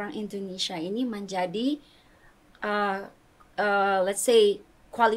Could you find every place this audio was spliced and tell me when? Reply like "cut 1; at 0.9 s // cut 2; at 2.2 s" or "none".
none